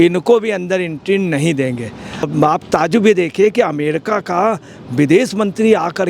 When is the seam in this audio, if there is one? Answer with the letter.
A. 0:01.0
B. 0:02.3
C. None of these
B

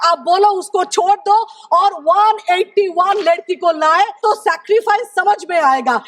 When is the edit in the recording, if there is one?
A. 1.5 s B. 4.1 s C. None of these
B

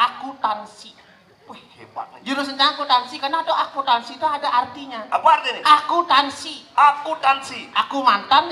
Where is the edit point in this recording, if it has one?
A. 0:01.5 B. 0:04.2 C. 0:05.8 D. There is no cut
D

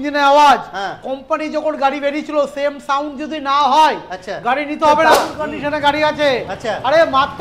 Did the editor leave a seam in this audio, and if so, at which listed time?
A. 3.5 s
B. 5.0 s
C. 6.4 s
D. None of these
B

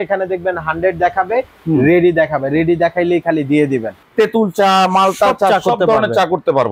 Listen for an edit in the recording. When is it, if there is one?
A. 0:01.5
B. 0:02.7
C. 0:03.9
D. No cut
C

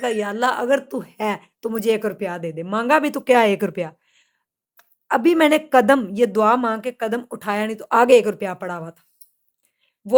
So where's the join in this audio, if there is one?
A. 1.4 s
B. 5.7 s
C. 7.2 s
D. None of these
D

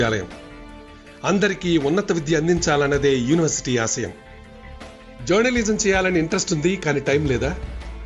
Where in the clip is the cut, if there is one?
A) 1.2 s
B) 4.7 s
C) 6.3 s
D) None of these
C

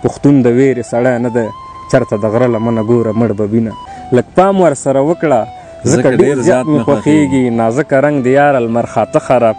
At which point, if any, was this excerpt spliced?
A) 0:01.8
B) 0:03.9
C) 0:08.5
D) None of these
B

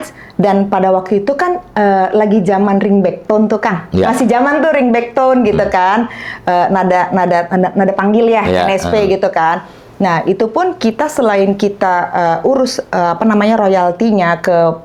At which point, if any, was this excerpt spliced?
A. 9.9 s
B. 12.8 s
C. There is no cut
C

